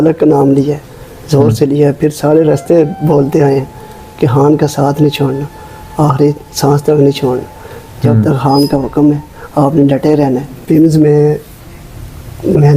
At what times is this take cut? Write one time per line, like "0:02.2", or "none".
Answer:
0:10.5